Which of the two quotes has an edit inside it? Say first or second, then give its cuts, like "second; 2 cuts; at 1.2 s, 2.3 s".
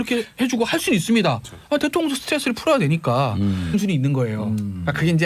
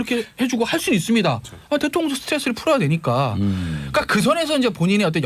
second; 1 cut; at 3.7 s